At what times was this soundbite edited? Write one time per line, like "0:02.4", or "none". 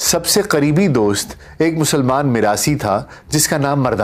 none